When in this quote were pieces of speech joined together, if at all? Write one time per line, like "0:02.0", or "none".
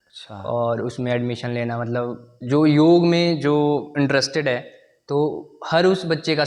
none